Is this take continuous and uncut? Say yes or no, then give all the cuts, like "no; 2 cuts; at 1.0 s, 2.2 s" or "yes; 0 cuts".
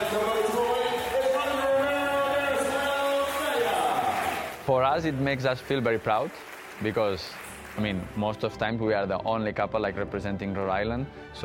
no; 1 cut; at 4.5 s